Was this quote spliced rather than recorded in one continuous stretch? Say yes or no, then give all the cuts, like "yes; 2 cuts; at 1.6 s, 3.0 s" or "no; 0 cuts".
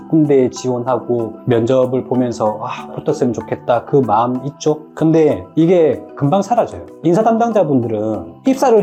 no; 0 cuts